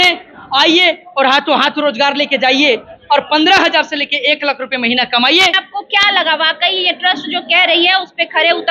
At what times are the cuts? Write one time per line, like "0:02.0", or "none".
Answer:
0:05.6